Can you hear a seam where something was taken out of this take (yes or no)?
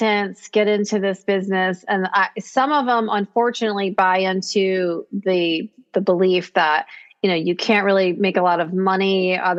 no